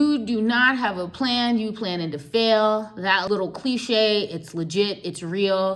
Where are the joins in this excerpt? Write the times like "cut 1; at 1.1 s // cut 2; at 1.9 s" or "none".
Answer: cut 1; at 3.2 s